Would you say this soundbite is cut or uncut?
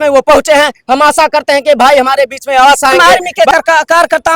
cut